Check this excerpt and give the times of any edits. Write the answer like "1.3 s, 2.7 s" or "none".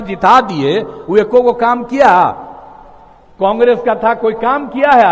none